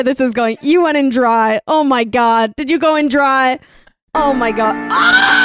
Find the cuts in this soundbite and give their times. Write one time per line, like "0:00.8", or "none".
none

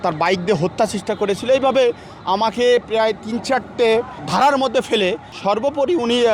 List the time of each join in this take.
0:04.2
0:05.3

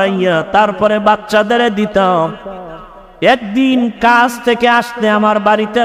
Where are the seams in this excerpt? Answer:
none

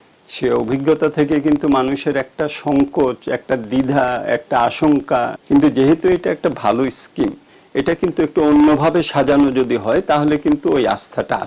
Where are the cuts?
0:05.3

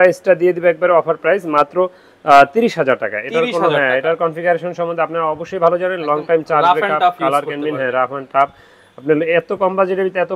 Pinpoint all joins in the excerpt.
none

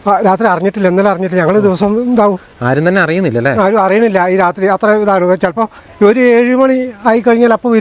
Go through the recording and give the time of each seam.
none

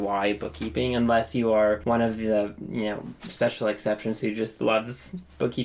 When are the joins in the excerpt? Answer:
0:01.8

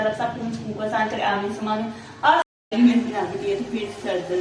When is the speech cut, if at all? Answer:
0:02.6

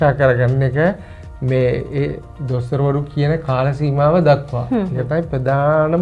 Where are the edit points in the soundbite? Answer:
none

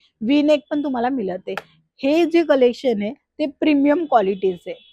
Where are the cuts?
none

